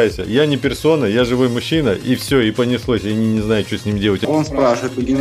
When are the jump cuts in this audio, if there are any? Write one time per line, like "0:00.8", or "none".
0:04.2

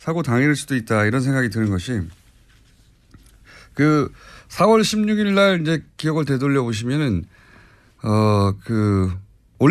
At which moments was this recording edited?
none

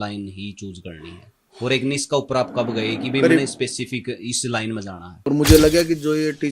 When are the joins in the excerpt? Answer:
0:05.1

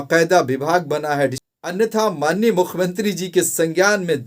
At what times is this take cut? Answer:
0:01.5

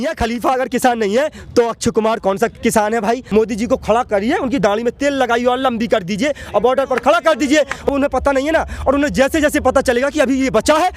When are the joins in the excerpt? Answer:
0:03.2
0:07.9

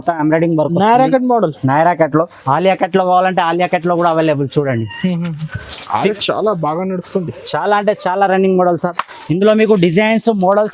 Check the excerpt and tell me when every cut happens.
0:02.4
0:06.1

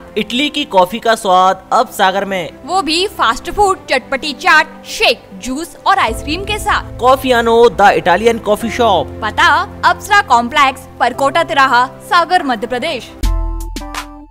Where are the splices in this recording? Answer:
0:13.2

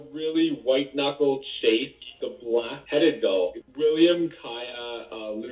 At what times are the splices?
0:01.9
0:03.6

